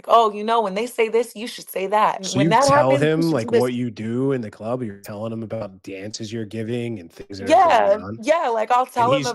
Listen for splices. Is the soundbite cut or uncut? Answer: cut